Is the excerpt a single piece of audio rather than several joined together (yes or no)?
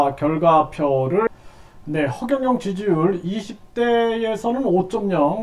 no